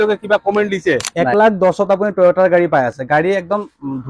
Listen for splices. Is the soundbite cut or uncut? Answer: cut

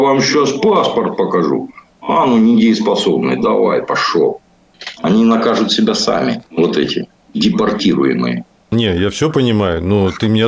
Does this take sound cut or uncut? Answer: cut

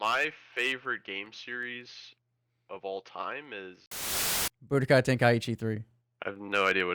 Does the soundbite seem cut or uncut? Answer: cut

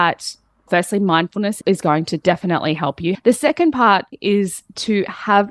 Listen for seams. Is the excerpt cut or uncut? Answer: cut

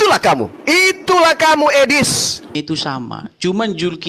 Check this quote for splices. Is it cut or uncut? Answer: cut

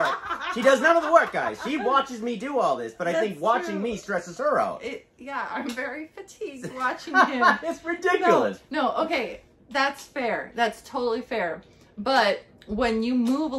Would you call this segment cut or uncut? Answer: uncut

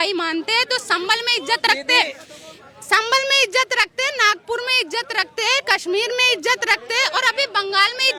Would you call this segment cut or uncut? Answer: uncut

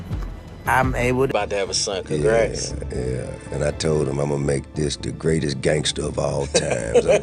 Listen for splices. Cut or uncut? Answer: cut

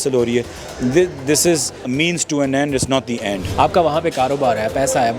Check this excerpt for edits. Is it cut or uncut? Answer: cut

